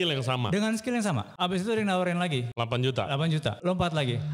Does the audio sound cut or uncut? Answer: cut